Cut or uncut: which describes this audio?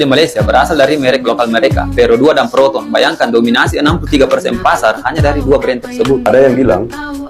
uncut